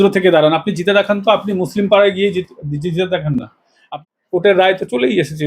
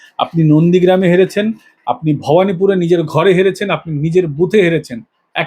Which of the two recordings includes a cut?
first; 1 cut; at 3.8 s

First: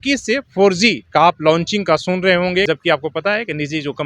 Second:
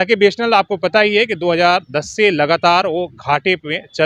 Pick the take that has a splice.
first; 2 cuts; at 1.0 s, 2.7 s

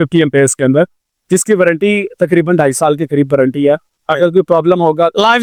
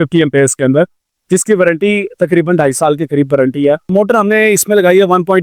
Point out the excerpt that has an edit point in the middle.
second; 1 cut; at 3.9 s

